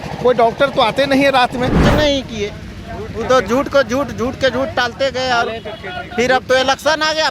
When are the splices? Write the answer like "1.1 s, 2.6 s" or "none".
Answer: 1.8 s